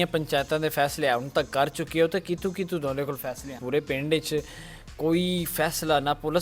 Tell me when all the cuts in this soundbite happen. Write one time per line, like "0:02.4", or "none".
0:03.6

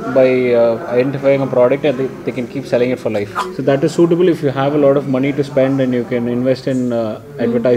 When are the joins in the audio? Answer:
0:03.4

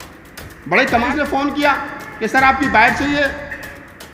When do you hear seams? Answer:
0:01.0

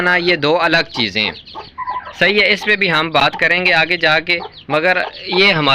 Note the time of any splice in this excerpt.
none

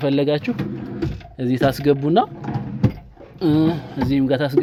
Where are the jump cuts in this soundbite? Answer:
none

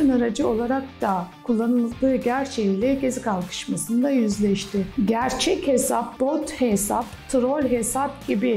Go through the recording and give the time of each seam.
0:04.9

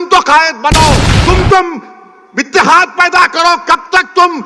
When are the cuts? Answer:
0:01.1

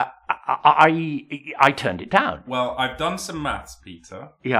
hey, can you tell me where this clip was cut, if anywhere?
0:02.5

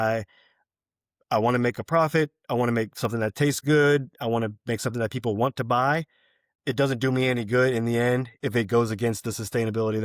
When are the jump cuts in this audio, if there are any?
0:08.3

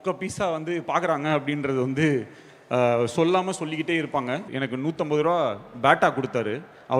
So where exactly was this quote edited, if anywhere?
0:04.5

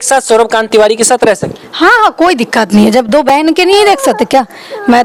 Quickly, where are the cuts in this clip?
none

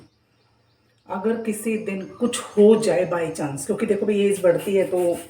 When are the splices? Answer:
none

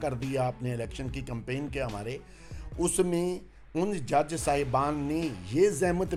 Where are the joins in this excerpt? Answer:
none

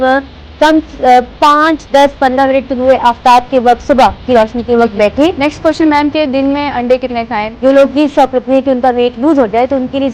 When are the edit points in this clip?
0:05.4
0:07.5

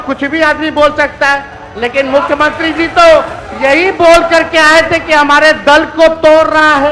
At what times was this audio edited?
none

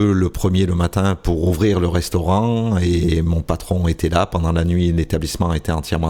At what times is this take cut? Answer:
none

